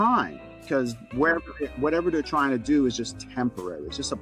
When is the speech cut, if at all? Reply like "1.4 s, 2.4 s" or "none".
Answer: none